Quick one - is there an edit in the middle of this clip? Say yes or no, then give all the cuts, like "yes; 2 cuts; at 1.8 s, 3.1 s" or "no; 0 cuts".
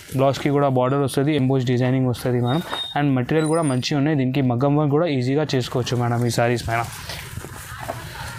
no; 0 cuts